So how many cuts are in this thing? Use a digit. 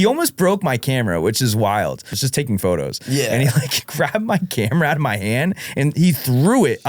1